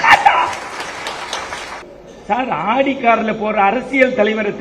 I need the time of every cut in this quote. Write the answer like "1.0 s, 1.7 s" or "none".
1.8 s

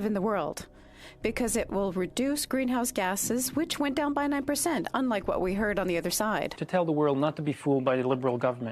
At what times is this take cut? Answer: 6.6 s

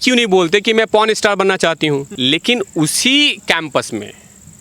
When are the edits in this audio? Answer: 2.1 s

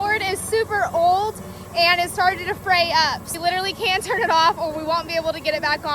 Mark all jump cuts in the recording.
3.3 s

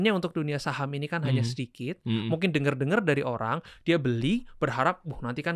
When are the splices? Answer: none

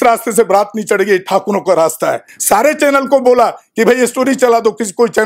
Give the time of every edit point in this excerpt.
2.3 s

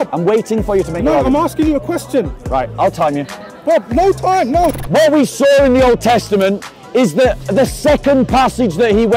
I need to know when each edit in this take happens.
4.8 s

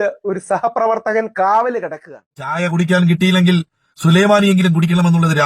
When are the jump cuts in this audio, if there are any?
2.6 s

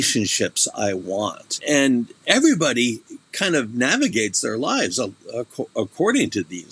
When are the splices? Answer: 1.6 s

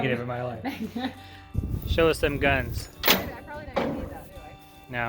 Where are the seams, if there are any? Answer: 1.5 s

